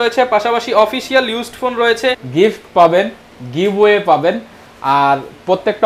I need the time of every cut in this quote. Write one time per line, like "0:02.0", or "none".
0:02.2